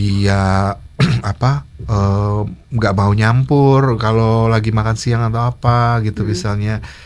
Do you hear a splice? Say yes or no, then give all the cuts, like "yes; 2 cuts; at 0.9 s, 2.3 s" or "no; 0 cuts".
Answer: no; 0 cuts